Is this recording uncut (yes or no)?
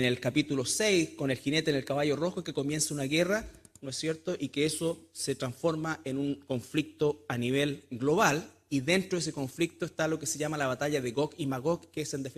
no